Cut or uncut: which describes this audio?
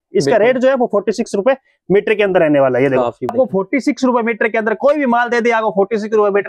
cut